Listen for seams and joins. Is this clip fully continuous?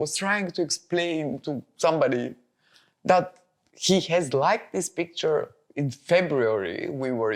yes; 0 cuts

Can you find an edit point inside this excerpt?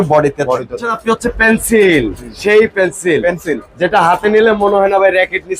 yes; 1 cut; at 0.9 s

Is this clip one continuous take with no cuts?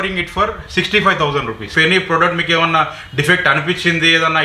no; 1 cut; at 1.6 s

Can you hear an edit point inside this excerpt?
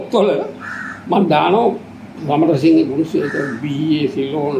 no; 0 cuts

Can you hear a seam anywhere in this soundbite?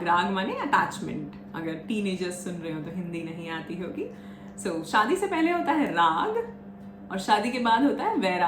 no; 0 cuts

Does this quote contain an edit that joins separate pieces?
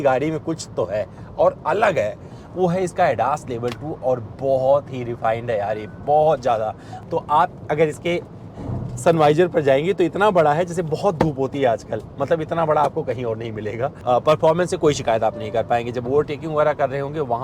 yes; 3 cuts; at 2.4 s, 6.9 s, 14.0 s

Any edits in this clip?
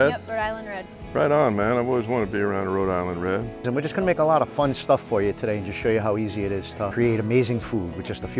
yes; 2 cuts; at 3.5 s, 6.9 s

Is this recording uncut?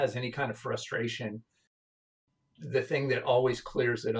no; 1 cut; at 1.8 s

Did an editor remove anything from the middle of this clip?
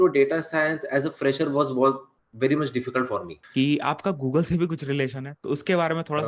yes; 1 cut; at 3.4 s

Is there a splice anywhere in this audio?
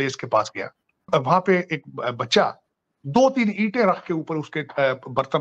yes; 1 cut; at 1.0 s

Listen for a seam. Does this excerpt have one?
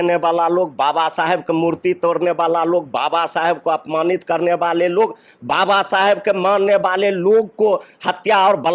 no; 0 cuts

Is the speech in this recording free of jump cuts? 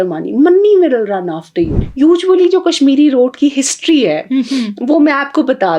no; 1 cut; at 1.8 s

